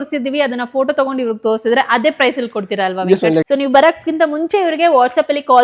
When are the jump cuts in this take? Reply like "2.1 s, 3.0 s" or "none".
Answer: 3.5 s